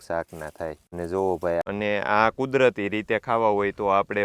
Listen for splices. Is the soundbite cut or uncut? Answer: cut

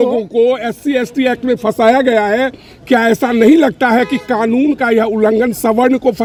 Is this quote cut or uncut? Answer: uncut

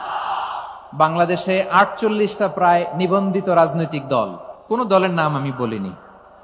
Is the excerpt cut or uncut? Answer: cut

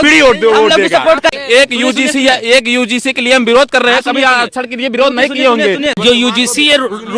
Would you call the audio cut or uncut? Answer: cut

